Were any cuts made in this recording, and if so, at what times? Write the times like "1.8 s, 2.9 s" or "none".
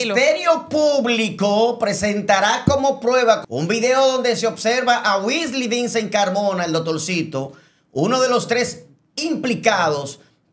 3.4 s